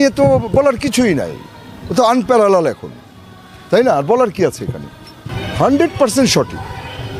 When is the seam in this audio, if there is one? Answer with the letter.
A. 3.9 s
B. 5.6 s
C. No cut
B